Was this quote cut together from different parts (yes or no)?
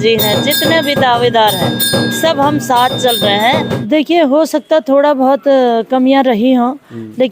yes